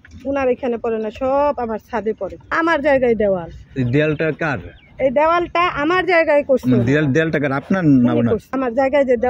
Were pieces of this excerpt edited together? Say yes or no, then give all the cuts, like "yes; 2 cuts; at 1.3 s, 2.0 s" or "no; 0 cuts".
yes; 2 cuts; at 2.4 s, 8.5 s